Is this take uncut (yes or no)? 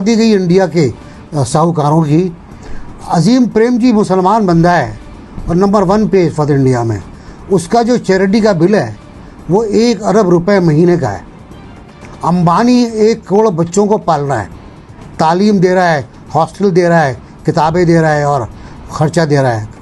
yes